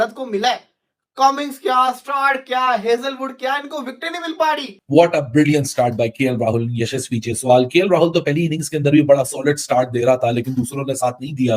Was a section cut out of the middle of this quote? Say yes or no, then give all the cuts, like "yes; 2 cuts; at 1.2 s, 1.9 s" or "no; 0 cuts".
yes; 1 cut; at 4.8 s